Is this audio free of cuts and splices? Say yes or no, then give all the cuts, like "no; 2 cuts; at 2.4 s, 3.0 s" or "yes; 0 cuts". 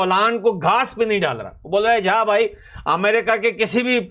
yes; 0 cuts